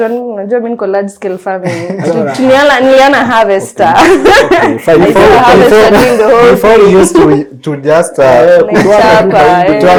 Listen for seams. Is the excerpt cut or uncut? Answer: uncut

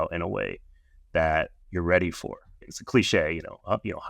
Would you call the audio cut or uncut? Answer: cut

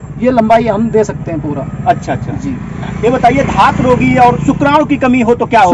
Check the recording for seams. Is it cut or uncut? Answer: uncut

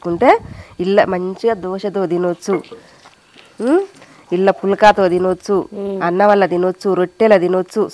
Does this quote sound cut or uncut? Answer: uncut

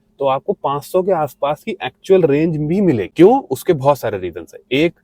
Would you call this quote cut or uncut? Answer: uncut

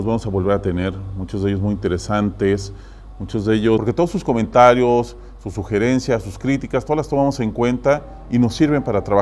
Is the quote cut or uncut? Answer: uncut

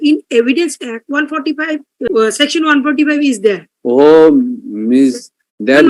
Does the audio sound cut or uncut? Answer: uncut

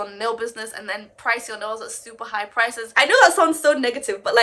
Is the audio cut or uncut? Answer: cut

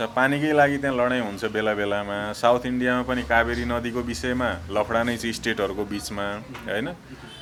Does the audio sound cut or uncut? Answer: uncut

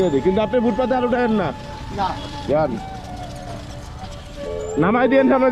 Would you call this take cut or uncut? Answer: uncut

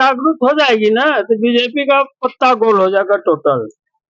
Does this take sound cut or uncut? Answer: uncut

